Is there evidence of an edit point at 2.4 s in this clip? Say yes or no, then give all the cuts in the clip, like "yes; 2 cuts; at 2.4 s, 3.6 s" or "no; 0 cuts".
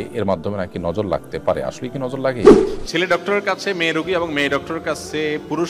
yes; 1 cut; at 2.4 s